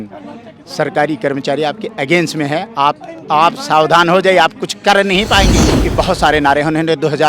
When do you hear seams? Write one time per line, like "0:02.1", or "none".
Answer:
0:05.8